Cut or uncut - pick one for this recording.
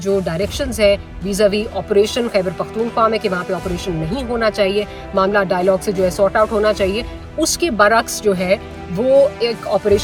uncut